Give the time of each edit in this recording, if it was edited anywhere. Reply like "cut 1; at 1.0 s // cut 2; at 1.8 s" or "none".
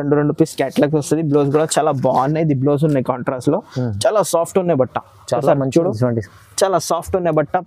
none